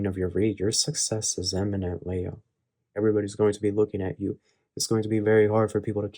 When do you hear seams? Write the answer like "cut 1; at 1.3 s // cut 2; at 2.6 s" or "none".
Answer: cut 1; at 2.9 s